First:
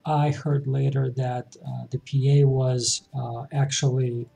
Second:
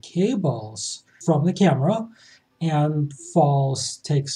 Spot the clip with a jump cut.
second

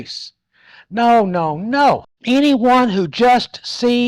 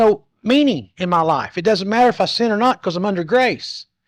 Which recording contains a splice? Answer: first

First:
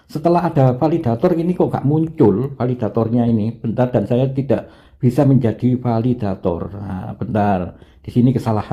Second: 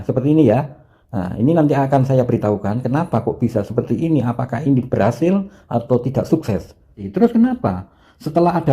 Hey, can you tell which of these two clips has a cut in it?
second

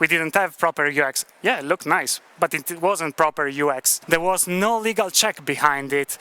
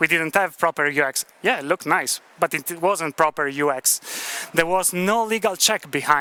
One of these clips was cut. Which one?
first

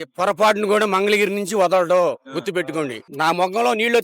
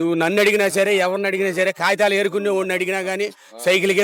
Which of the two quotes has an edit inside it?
first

